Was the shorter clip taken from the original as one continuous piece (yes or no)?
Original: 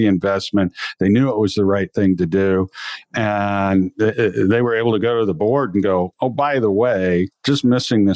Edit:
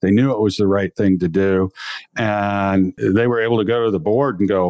no